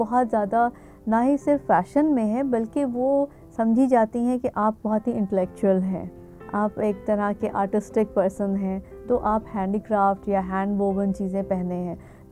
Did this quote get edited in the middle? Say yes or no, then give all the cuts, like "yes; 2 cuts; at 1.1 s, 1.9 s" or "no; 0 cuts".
no; 0 cuts